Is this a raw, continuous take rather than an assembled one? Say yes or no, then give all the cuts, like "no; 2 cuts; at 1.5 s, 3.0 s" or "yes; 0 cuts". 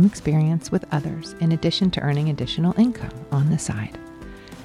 yes; 0 cuts